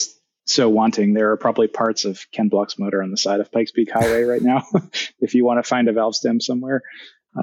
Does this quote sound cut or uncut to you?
uncut